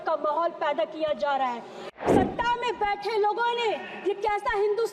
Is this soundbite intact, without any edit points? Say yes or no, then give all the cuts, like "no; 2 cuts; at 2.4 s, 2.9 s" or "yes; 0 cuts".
no; 1 cut; at 1.8 s